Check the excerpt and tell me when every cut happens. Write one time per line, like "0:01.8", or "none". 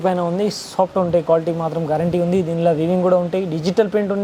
none

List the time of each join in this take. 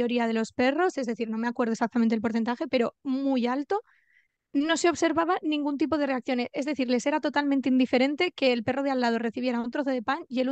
none

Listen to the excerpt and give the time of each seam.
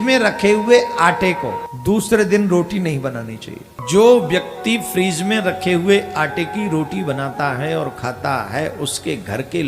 0:01.7
0:03.7

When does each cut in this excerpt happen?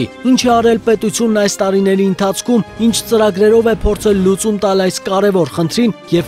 none

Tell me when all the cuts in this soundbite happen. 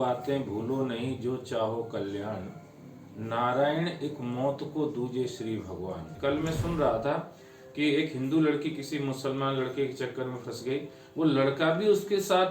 0:06.1

